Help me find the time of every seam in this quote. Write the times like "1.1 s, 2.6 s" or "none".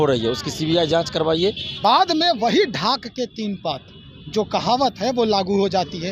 1.7 s

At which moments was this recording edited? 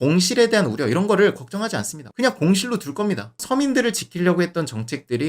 2.1 s, 3.3 s

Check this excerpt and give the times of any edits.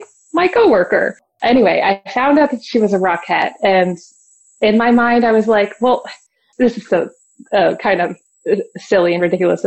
6.5 s, 8.3 s

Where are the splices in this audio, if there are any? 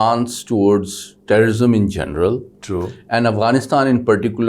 none

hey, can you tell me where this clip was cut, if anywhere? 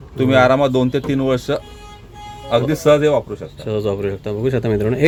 none

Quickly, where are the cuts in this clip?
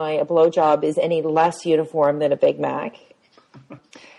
none

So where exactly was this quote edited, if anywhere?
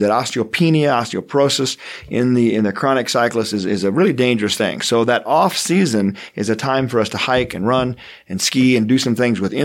none

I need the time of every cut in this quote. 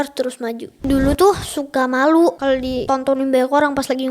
0.8 s, 2.5 s

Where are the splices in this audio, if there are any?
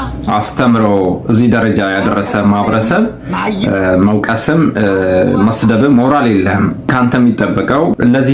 none

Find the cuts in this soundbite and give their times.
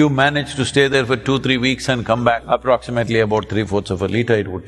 2.4 s

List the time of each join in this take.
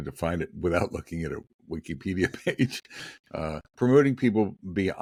none

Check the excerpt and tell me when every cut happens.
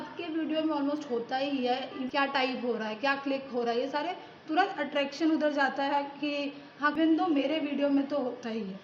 2.0 s, 6.9 s

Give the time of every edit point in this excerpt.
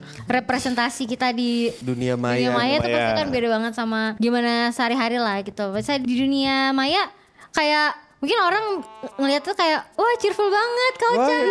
1.8 s, 4.1 s, 6.0 s

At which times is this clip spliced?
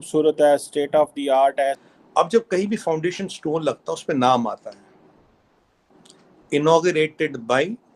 1.8 s

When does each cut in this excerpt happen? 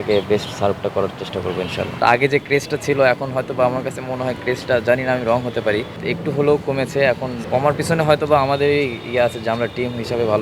2.0 s, 6.0 s, 7.4 s

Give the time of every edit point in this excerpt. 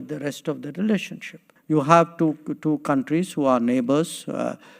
1.5 s

